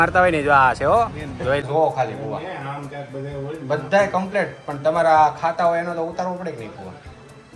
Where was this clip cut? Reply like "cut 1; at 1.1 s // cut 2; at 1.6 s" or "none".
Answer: cut 1; at 1.6 s